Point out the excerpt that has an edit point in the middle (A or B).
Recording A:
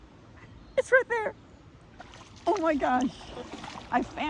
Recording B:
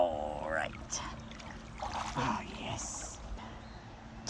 B